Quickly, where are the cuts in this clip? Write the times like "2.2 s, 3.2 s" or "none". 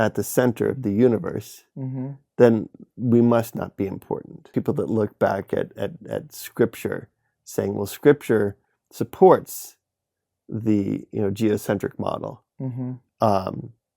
4.4 s